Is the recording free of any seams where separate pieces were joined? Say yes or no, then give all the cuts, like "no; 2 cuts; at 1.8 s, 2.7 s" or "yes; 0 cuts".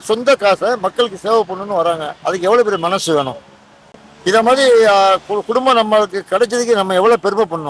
yes; 0 cuts